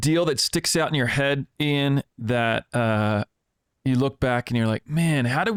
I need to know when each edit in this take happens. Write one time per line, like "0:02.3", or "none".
none